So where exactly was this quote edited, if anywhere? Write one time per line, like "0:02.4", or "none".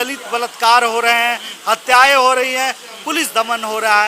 none